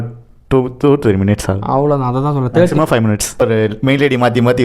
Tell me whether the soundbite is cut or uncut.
cut